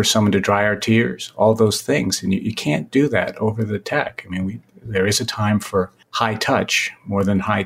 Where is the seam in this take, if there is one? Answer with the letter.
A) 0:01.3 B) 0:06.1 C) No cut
B